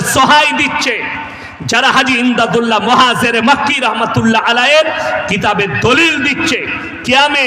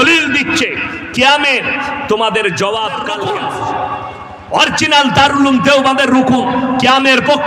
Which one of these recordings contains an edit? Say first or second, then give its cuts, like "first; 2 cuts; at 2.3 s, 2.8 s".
second; 1 cut; at 3.1 s